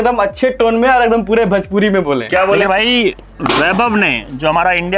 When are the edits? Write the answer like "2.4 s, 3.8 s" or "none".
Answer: 2.6 s